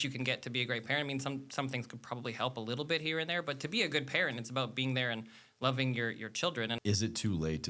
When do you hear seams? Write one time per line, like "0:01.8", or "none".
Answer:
0:06.8